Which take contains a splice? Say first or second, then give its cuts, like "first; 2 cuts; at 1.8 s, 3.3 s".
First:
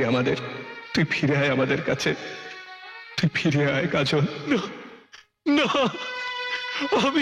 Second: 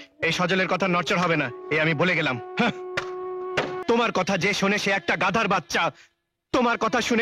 second; 1 cut; at 3.8 s